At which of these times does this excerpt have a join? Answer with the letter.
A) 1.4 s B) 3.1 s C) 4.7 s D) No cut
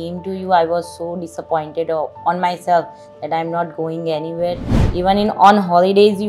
C